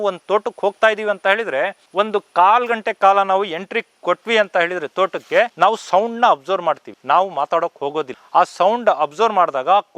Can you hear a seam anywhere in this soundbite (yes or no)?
yes